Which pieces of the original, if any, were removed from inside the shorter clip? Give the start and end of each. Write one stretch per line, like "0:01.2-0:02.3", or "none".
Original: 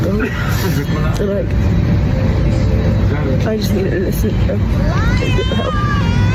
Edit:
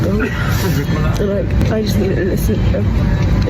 0:01.6-0:03.4